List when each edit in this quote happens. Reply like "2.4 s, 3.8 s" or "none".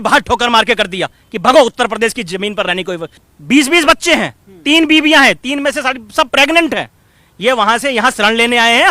3.2 s